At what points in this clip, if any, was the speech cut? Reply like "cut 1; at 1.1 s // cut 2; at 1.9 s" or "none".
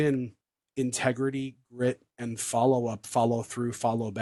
none